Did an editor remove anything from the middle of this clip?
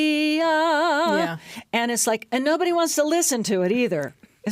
no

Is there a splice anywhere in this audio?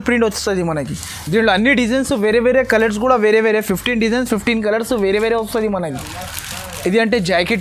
no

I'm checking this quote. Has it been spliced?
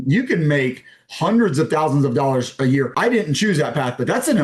yes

